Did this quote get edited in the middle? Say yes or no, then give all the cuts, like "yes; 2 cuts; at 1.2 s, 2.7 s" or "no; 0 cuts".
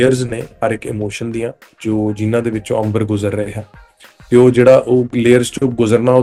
no; 0 cuts